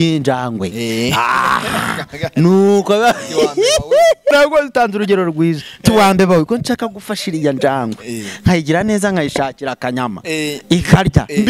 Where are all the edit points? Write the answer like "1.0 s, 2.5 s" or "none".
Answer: 4.3 s